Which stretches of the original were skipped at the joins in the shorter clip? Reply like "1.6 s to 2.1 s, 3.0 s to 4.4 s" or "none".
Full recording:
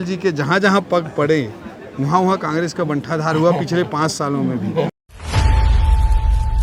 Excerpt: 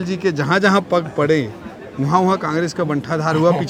none